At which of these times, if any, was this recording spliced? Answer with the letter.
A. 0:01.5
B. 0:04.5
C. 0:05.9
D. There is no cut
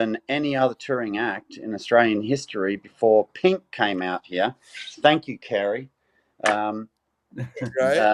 D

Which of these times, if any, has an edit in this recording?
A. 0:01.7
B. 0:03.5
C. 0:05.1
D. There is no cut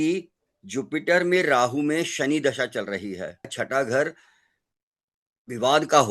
B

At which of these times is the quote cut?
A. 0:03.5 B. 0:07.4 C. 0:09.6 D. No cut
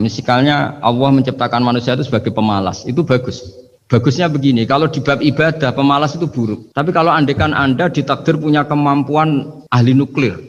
C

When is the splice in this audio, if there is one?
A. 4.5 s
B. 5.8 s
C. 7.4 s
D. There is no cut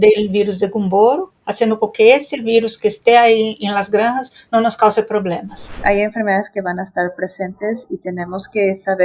B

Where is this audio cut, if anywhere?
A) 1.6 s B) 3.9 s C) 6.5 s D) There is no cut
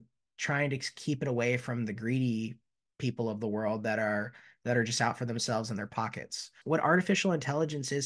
C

